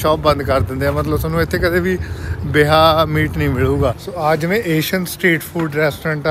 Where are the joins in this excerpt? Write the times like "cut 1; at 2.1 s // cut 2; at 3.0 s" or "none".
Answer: cut 1; at 4.0 s